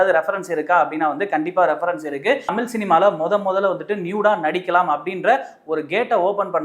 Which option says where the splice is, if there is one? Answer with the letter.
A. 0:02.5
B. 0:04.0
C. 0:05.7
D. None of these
A